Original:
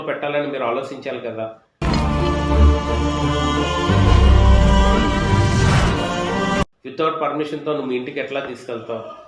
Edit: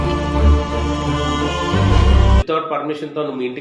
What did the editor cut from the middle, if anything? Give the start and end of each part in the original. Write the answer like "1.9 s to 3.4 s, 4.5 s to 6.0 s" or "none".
4.6 s to 6.9 s